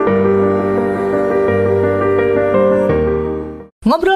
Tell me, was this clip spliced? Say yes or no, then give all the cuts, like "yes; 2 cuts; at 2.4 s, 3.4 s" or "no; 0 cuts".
no; 0 cuts